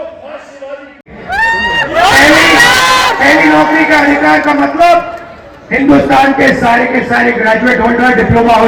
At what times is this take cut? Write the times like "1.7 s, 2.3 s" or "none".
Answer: 1.1 s